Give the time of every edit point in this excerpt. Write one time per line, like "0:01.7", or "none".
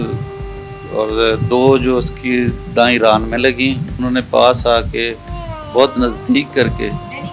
0:03.9